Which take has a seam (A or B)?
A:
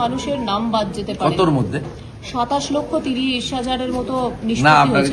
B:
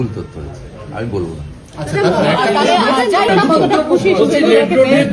B